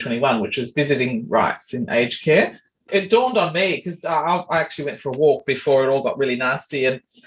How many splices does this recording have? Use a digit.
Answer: 1